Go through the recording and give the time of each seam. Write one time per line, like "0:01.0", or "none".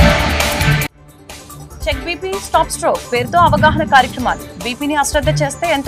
0:01.8